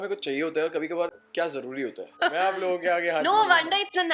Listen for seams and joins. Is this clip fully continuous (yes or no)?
no